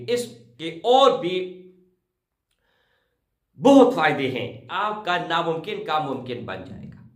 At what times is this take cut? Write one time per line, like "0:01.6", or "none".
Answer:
0:04.6